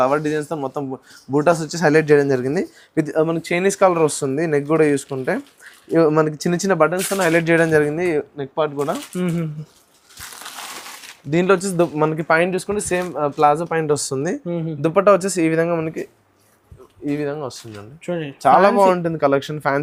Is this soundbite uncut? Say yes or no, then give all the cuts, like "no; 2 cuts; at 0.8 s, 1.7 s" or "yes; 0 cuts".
yes; 0 cuts